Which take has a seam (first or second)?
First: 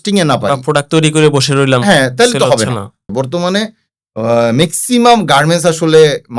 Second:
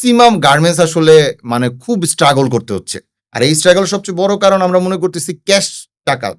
first